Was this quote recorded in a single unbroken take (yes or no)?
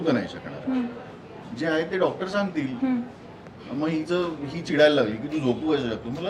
yes